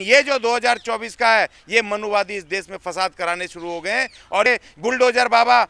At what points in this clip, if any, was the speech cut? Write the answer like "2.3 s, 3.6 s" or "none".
4.5 s